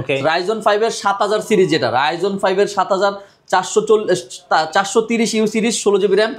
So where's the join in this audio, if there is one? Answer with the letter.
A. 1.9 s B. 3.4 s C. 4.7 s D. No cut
D